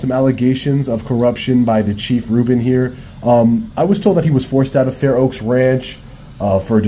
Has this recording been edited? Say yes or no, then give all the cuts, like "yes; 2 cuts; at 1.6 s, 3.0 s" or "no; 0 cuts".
no; 0 cuts